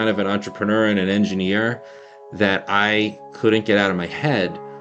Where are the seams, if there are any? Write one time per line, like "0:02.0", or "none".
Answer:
none